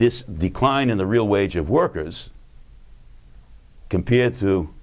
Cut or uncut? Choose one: cut